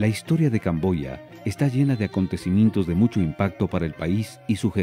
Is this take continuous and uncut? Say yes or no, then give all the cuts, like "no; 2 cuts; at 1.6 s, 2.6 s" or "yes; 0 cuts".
yes; 0 cuts